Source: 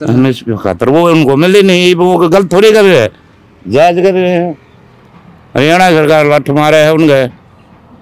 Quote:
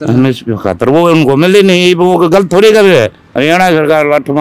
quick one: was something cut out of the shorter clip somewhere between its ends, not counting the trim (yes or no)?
yes